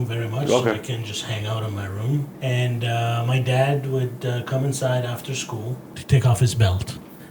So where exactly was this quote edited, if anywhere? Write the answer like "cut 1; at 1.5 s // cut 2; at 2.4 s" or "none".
cut 1; at 2.3 s // cut 2; at 6.0 s